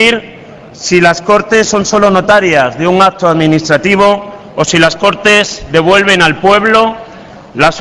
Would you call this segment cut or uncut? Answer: cut